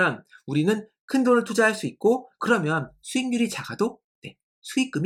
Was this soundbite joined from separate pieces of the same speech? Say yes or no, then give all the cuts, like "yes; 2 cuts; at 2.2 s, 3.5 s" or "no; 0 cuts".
no; 0 cuts